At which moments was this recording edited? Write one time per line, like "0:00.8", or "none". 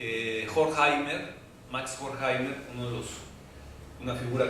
0:03.5